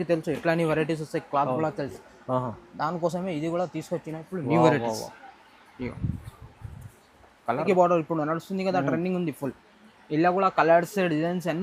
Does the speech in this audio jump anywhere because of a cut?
yes; 1 cut; at 7.6 s

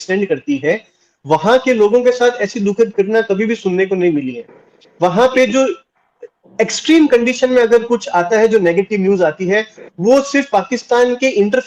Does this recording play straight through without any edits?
yes; 0 cuts

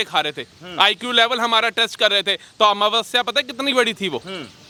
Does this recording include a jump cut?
no; 0 cuts

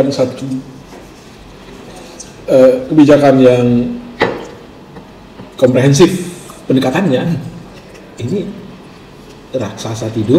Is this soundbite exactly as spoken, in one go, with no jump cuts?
yes; 0 cuts

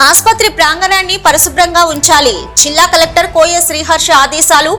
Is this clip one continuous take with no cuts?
yes; 0 cuts

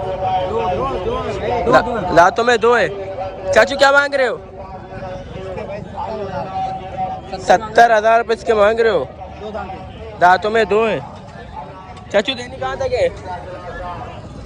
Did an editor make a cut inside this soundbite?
no; 0 cuts

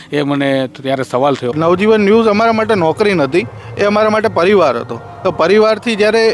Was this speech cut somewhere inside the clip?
yes; 1 cut; at 1.5 s

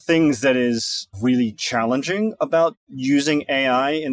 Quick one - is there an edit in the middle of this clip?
yes; 2 cuts; at 1.1 s, 2.9 s

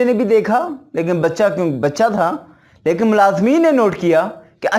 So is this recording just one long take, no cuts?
yes; 0 cuts

